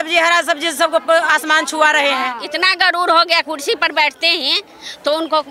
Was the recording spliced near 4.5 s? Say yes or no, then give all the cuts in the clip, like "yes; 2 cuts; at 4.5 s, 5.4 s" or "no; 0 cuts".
no; 1 cut; at 2.4 s